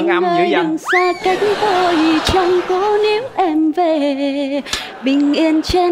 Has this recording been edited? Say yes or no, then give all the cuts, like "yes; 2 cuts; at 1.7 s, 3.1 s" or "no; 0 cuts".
no; 0 cuts